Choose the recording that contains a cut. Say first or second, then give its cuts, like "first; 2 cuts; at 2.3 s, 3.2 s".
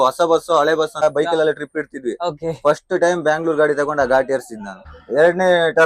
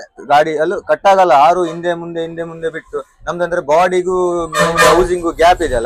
first; 2 cuts; at 1.0 s, 4.9 s